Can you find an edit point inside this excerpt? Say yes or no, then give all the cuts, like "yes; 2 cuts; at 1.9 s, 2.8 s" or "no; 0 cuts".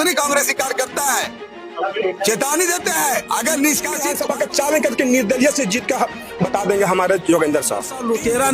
yes; 2 cuts; at 4.0 s, 7.7 s